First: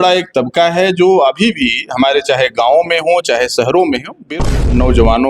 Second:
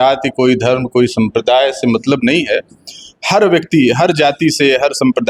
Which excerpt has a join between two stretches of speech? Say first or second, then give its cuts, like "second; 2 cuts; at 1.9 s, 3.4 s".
first; 1 cut; at 4.3 s